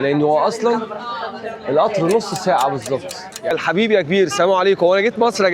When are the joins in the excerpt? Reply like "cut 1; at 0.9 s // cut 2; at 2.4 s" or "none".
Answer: cut 1; at 3.5 s